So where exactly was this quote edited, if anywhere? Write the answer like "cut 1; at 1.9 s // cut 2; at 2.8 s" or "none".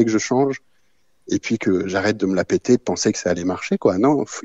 none